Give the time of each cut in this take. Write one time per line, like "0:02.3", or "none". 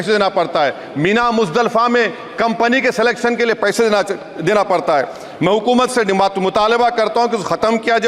none